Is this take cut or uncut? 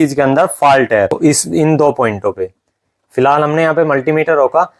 cut